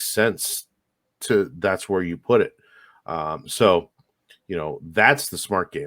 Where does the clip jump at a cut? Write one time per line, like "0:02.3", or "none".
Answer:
none